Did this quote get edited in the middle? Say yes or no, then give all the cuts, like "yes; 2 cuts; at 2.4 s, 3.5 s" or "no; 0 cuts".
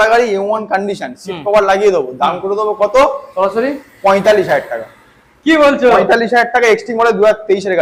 no; 0 cuts